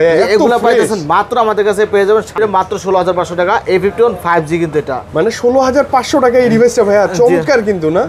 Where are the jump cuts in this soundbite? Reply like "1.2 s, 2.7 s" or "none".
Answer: 2.4 s